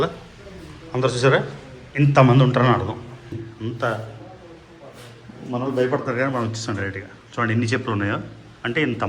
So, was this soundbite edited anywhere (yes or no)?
yes